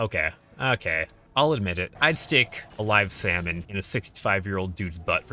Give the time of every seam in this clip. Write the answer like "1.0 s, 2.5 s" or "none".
1.2 s, 1.9 s, 2.6 s, 3.6 s